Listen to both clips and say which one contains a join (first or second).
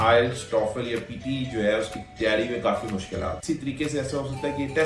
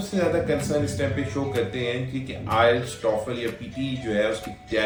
first